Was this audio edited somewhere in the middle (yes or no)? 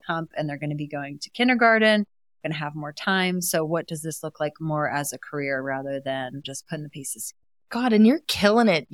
yes